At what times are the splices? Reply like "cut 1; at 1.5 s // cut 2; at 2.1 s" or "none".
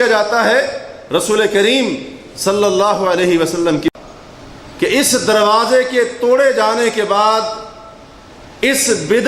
cut 1; at 3.9 s